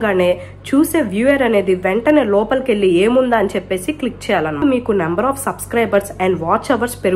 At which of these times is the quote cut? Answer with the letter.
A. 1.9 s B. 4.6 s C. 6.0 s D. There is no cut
B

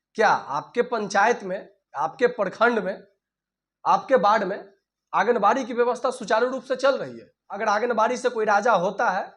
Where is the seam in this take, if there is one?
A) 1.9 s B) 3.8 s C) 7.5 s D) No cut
C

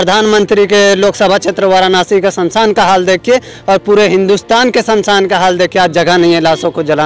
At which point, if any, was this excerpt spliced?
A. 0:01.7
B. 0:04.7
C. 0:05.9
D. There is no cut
D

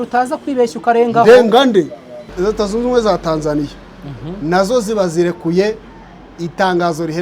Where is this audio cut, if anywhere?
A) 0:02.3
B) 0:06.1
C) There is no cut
A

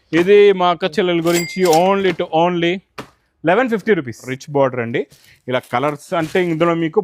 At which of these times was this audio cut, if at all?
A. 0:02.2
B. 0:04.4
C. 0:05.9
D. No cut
B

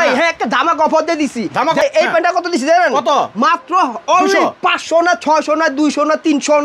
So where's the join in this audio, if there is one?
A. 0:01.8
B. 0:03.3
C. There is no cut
A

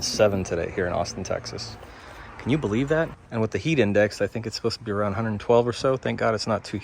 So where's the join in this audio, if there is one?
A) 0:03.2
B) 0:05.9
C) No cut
A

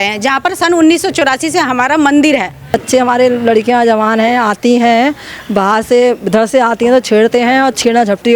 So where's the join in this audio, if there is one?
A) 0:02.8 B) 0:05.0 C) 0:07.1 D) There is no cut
A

